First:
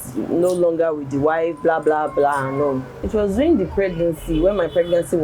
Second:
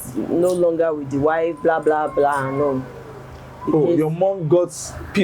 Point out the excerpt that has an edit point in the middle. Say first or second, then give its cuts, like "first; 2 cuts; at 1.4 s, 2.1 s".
first; 1 cut; at 2.9 s